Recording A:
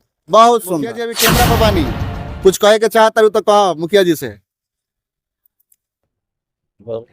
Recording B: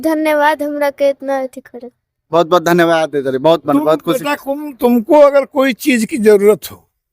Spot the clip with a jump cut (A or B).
A